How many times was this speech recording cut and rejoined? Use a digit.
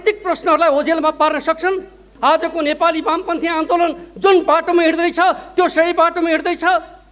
1